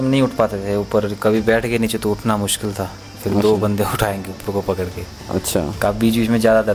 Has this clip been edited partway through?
no; 0 cuts

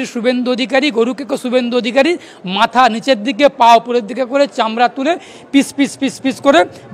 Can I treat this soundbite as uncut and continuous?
yes; 0 cuts

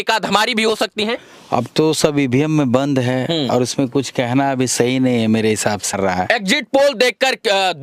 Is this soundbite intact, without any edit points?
no; 1 cut; at 5.9 s

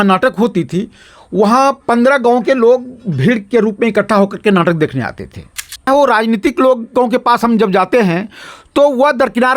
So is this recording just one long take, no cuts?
no; 1 cut; at 5.8 s

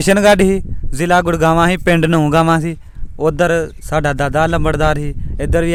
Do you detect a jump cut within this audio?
no; 0 cuts

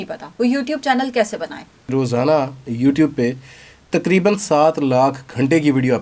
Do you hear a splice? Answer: yes; 1 cut; at 1.9 s

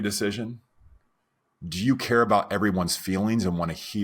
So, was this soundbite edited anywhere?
no; 0 cuts

